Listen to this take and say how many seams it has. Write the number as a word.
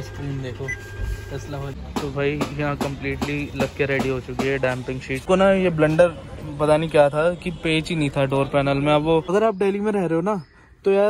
three